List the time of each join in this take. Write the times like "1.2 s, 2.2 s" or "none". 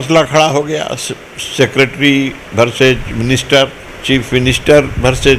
3.9 s